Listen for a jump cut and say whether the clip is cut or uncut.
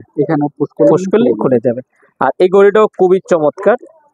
uncut